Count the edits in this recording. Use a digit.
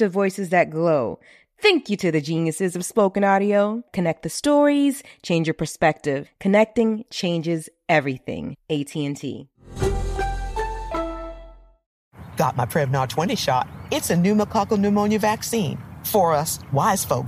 1